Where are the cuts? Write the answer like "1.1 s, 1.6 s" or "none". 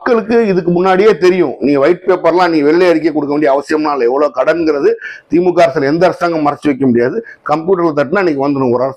none